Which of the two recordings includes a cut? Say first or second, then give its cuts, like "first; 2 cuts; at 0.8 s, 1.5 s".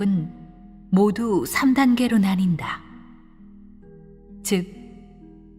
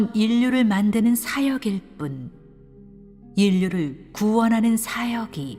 first; 1 cut; at 1.5 s